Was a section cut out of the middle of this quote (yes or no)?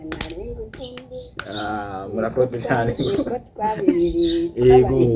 no